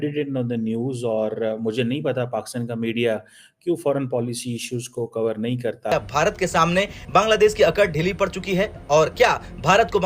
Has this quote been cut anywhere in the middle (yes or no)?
yes